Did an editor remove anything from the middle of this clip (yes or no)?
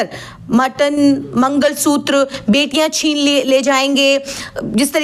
no